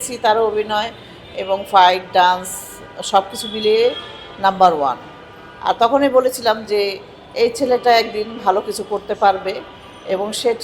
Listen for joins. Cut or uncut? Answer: uncut